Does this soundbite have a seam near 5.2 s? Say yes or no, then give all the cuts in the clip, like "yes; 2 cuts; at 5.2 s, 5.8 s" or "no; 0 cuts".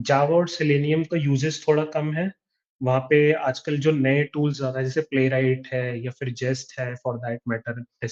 no; 0 cuts